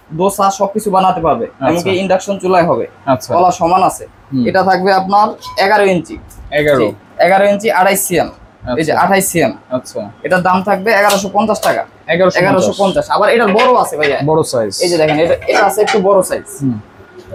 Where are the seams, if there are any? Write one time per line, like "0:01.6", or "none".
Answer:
none